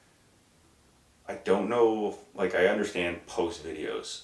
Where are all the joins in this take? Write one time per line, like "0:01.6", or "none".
none